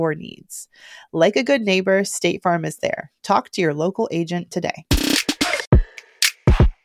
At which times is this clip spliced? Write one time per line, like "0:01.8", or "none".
0:05.6

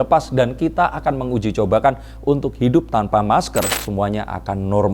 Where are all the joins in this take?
0:03.8

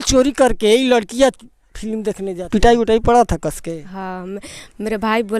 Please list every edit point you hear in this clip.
0:02.2

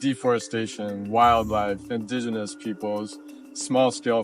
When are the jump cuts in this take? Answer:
0:00.9
0:01.8

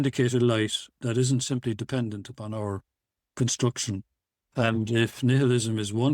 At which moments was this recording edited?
0:04.4

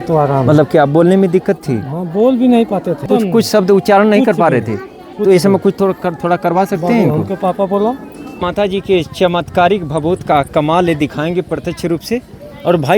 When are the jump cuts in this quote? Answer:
0:03.1
0:08.3

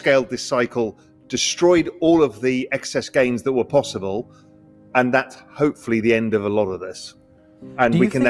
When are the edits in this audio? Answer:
none

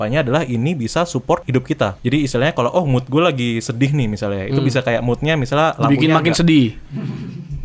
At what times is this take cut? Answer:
0:01.7

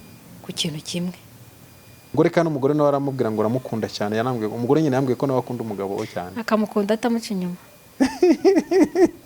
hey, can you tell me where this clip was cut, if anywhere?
0:02.1

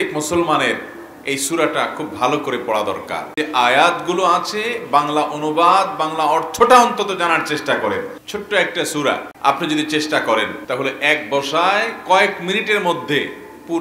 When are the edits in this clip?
0:03.3
0:08.2
0:09.3
0:10.6

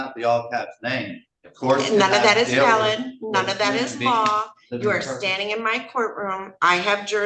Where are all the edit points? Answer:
none

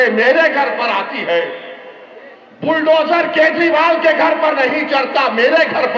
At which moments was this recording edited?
none

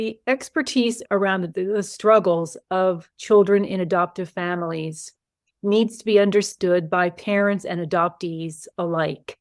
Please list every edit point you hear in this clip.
0:01.0

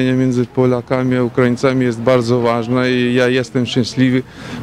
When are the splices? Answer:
none

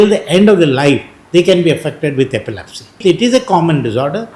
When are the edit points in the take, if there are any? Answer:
0:03.0

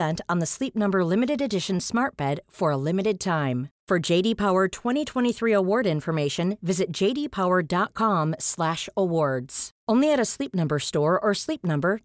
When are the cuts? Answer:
none

